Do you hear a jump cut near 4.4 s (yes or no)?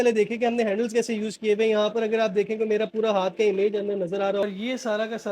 yes